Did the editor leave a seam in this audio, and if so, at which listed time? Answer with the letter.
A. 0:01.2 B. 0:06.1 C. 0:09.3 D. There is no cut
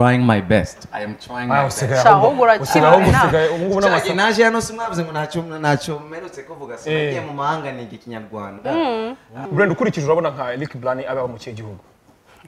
C